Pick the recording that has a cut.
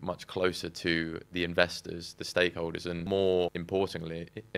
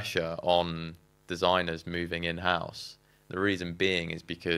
first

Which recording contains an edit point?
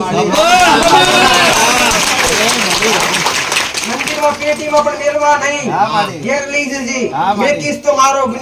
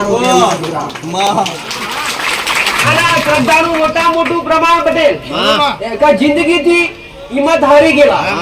second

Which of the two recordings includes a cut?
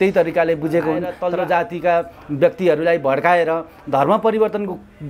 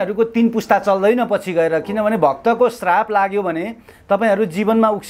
first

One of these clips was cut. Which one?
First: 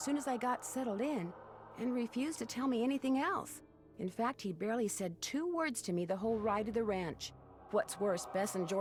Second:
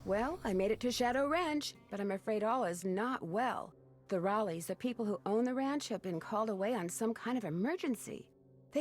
second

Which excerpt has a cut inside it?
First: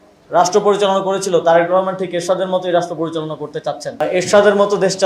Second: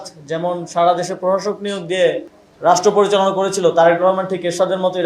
first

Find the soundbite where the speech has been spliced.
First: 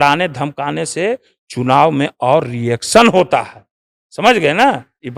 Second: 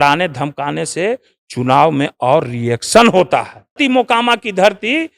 second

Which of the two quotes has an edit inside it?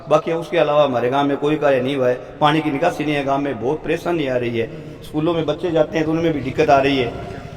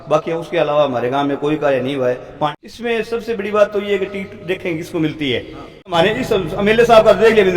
second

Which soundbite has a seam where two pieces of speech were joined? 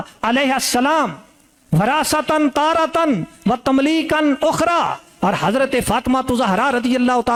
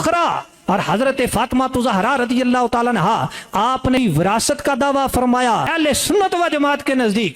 second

